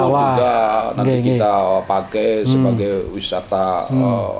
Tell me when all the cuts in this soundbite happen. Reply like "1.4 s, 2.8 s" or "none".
none